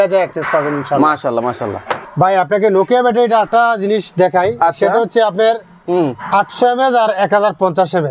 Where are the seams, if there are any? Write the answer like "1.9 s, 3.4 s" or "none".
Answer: none

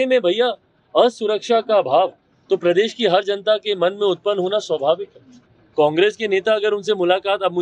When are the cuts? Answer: 5.2 s

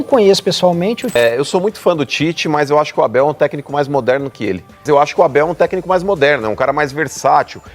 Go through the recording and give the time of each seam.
1.2 s, 4.8 s

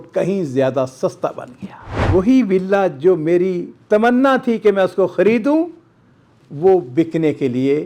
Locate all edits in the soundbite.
2.1 s

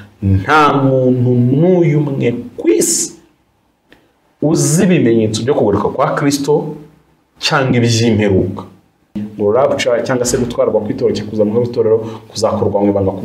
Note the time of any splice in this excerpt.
9.2 s

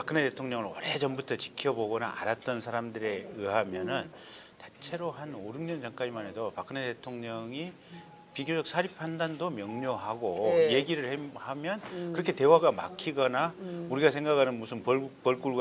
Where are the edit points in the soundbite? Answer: none

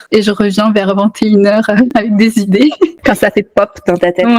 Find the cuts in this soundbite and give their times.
2.9 s

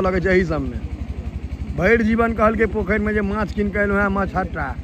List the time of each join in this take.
none

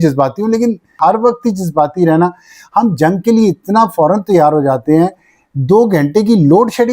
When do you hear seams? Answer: 1.0 s

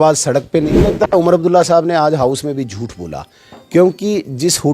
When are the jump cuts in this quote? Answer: 0.9 s

